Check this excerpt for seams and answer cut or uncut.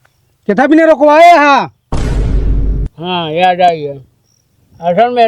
cut